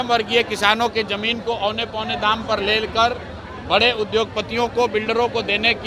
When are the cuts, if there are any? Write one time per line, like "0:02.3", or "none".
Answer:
none